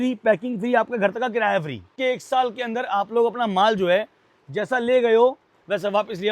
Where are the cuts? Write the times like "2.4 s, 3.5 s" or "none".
1.9 s